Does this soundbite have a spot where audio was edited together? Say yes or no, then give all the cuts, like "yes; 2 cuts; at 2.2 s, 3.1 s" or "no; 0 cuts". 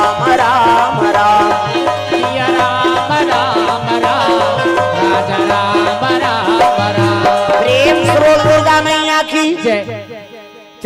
no; 0 cuts